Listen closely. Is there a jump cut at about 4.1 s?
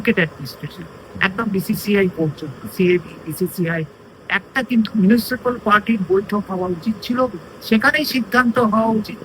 yes; 1 cut; at 4.1 s

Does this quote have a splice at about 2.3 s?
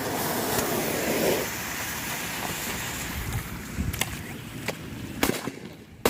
no; 0 cuts

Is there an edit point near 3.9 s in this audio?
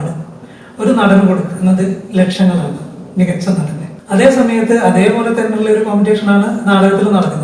yes; 1 cut; at 3.9 s

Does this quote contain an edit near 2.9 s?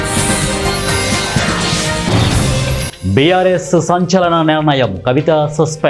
yes; 1 cut; at 2.9 s

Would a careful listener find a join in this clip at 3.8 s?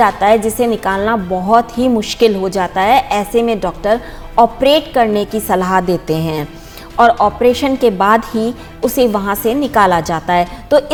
no; 0 cuts

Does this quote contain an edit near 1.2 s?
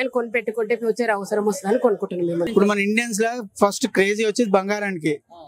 no; 1 cut; at 2.5 s

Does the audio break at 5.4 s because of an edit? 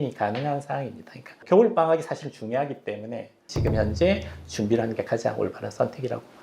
no; 1 cut; at 3.3 s

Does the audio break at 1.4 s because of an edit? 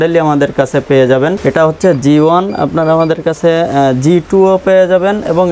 yes; 1 cut; at 1.4 s

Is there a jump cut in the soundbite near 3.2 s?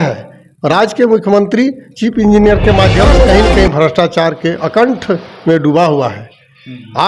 yes; 1 cut; at 3.2 s

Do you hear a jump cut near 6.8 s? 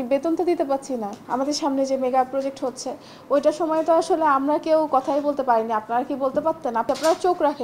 yes; 2 cuts; at 1.2 s, 6.8 s

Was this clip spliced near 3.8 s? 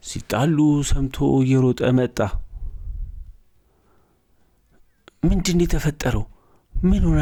no; 0 cuts

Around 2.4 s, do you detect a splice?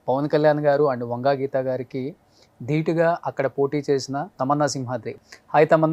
no; 2 cuts; at 4.3 s, 5.1 s

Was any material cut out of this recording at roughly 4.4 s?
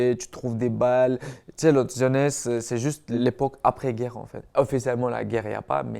yes; 2 cuts; at 3.2 s, 4.4 s

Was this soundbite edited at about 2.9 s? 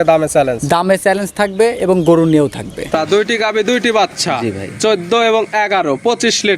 yes; 1 cut; at 2.9 s

